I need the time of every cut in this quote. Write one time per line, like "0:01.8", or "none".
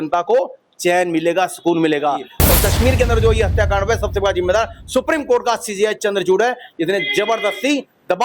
0:02.4

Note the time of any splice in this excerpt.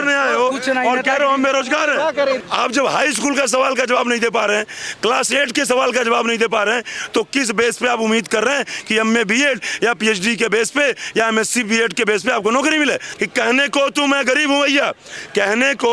0:02.4
0:13.1

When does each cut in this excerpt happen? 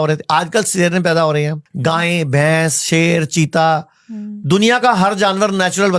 0:01.6

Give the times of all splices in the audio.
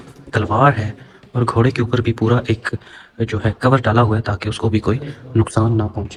none

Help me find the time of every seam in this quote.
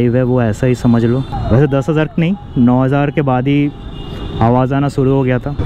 none

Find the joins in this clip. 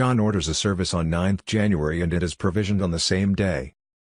0:01.4

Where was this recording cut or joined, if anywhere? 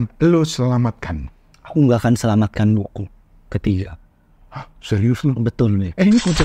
none

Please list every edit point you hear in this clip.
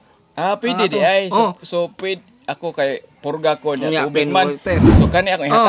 none

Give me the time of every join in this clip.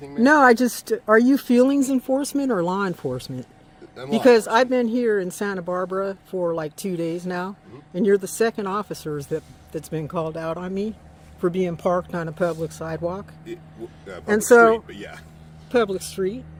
none

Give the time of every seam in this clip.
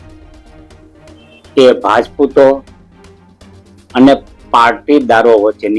0:00.9

